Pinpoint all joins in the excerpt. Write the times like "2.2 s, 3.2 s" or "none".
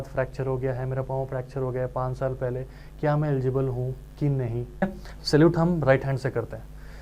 4.8 s